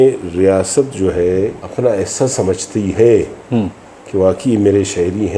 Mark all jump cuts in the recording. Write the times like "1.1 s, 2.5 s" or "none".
1.6 s